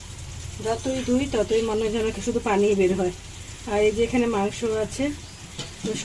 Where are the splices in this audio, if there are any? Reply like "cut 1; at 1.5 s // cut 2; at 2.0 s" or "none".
none